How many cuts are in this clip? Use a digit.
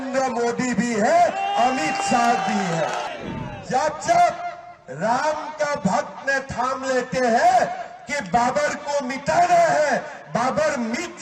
1